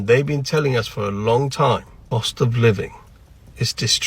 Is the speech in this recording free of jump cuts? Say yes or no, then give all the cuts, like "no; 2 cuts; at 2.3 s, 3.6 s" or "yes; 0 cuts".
no; 1 cut; at 1.9 s